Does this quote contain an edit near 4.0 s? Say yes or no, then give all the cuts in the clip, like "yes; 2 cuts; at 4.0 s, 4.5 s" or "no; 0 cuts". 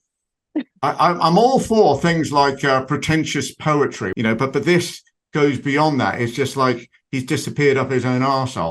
yes; 1 cut; at 4.0 s